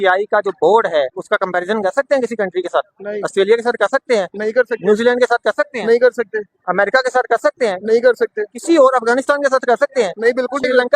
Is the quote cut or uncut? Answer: cut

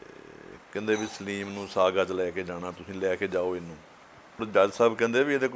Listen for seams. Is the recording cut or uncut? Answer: cut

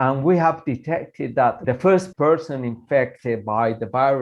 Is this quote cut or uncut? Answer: cut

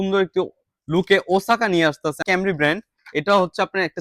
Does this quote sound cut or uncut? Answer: cut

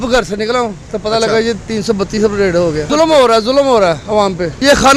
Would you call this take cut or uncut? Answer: uncut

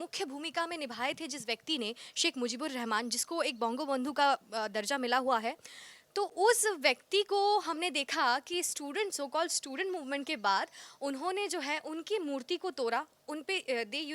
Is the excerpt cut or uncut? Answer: uncut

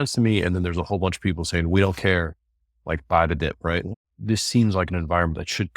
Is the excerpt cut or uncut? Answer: cut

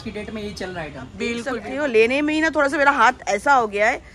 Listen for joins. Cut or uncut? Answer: cut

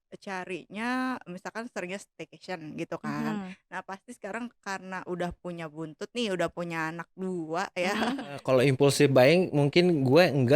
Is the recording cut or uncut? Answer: cut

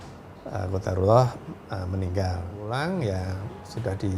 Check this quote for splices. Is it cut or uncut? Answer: cut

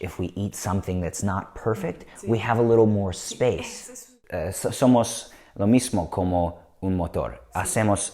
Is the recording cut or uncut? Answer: cut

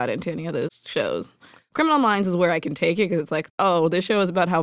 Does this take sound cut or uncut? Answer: cut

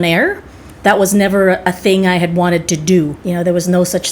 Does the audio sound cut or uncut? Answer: cut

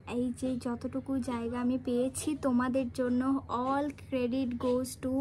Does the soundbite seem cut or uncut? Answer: uncut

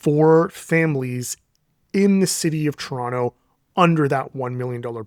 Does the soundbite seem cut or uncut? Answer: uncut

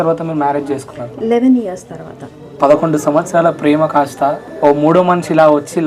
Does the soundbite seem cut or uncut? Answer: cut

